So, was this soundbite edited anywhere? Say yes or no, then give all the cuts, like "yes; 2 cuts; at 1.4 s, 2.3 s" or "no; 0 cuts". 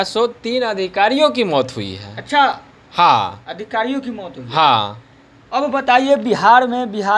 no; 0 cuts